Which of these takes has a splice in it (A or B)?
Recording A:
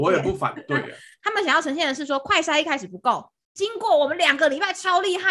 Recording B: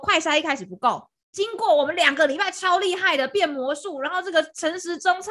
A